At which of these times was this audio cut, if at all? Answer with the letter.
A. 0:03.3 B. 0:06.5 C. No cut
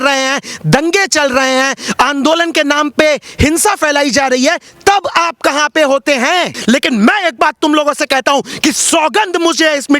B